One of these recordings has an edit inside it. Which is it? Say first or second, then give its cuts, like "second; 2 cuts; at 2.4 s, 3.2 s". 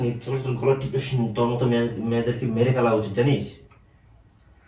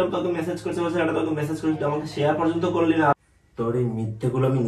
second; 1 cut; at 3.1 s